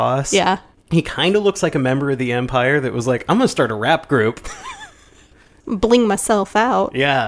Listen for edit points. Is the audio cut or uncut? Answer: cut